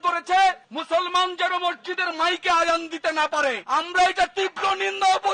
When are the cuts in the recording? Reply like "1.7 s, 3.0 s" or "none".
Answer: none